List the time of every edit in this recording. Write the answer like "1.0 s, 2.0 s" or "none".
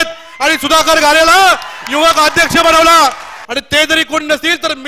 3.3 s